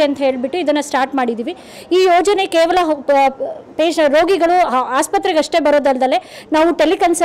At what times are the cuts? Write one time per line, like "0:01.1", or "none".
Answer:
none